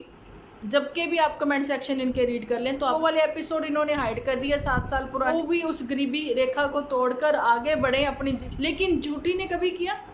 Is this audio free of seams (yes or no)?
no